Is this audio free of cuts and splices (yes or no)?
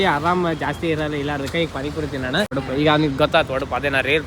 no